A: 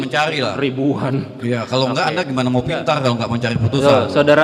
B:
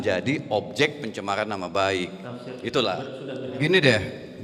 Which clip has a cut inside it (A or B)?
B